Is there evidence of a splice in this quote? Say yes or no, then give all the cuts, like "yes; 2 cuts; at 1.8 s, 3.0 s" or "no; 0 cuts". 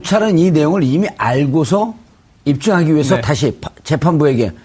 yes; 1 cut; at 1.5 s